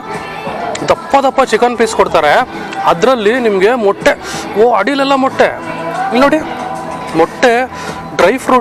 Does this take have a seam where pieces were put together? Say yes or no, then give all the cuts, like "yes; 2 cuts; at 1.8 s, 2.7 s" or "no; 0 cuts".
no; 0 cuts